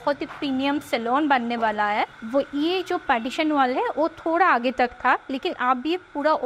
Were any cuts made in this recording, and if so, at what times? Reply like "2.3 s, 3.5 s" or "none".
2.2 s